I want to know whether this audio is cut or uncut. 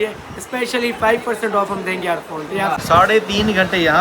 cut